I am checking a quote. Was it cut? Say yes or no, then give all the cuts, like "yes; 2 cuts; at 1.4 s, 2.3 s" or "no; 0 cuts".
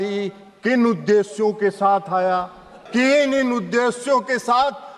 yes; 1 cut; at 2.7 s